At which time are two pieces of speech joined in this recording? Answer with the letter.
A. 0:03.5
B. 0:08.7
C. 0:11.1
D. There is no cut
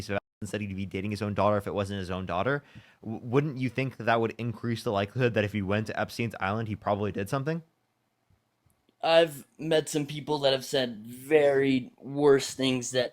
D